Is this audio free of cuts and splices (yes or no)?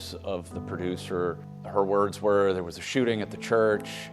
no